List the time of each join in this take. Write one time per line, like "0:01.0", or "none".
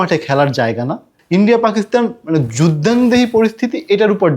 0:01.1